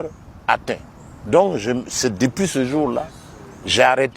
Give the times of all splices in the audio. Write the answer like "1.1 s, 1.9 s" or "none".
none